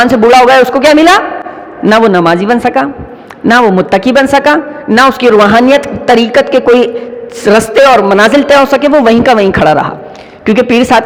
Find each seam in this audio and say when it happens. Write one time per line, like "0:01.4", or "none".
none